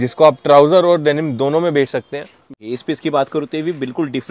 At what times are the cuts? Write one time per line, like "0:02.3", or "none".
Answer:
0:02.4